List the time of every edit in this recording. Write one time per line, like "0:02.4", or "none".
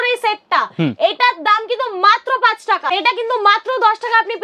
0:02.9